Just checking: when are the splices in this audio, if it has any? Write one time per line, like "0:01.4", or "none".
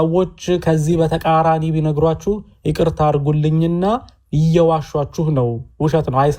none